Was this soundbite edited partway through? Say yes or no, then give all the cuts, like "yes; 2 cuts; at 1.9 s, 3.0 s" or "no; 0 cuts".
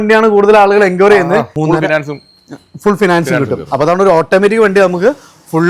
yes; 1 cut; at 1.5 s